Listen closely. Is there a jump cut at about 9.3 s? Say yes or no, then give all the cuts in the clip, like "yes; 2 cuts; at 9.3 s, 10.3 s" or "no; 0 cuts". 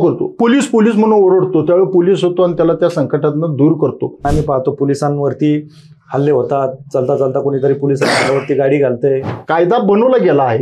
yes; 2 cuts; at 4.2 s, 9.3 s